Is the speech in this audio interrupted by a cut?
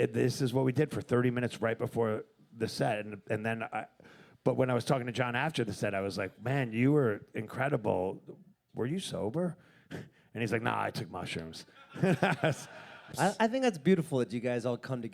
yes; 1 cut; at 13.1 s

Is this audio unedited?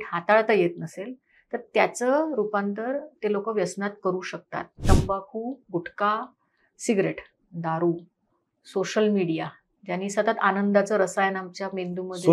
no; 1 cut; at 4.8 s

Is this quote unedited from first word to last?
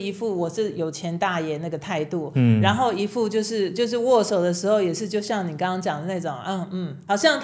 yes; 0 cuts

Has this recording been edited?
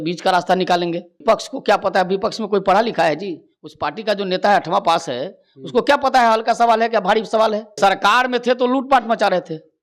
yes; 2 cuts; at 1.2 s, 7.7 s

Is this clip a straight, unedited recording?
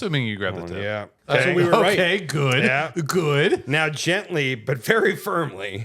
no; 1 cut; at 1.1 s

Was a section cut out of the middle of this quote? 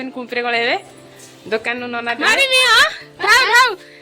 yes; 1 cut; at 2.2 s

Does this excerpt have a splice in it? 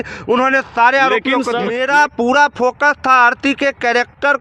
yes; 1 cut; at 1.7 s

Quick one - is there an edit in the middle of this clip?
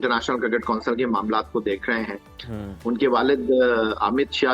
no; 0 cuts

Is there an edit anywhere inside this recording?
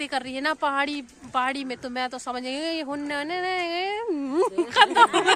no; 0 cuts

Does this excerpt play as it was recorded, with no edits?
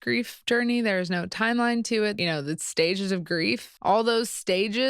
no; 2 cuts; at 2.2 s, 3.7 s

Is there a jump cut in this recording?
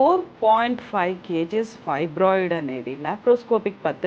no; 0 cuts

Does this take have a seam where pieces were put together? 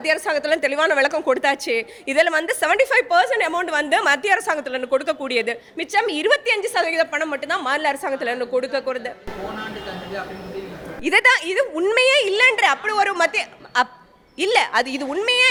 no; 0 cuts

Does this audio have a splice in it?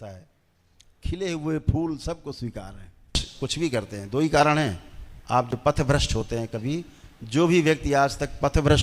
yes; 1 cut; at 3.2 s

